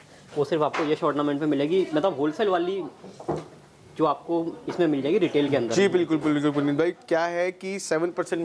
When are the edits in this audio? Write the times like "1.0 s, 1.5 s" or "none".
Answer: none